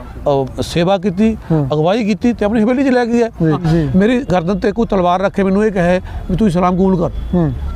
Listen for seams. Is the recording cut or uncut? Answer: cut